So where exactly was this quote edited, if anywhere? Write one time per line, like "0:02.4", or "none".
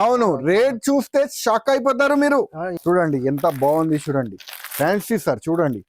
0:02.6